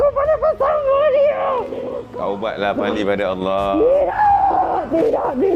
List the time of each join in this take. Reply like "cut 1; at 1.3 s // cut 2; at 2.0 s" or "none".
cut 1; at 1.9 s